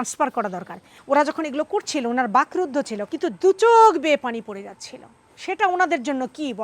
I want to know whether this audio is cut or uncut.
cut